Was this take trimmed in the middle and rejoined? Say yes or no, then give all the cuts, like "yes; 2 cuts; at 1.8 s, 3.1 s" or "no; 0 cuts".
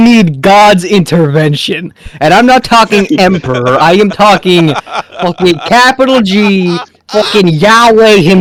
no; 0 cuts